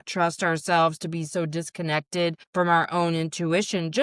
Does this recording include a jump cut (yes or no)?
yes